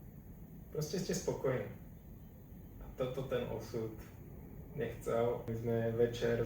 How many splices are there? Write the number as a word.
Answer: one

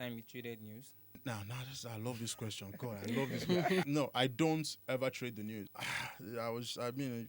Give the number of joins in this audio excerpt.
three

